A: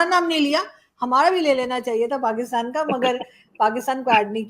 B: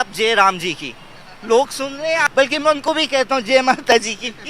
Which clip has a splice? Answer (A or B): B